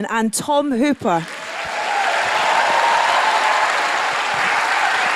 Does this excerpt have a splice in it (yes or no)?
yes